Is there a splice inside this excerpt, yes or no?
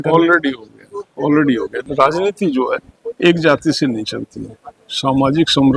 yes